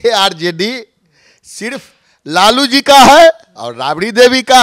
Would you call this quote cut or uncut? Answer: uncut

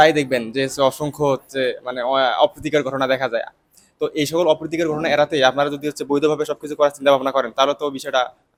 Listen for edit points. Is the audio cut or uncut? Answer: uncut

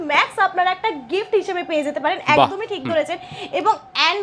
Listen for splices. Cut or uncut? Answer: uncut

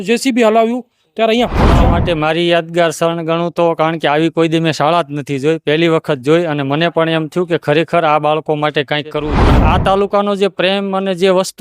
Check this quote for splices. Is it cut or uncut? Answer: cut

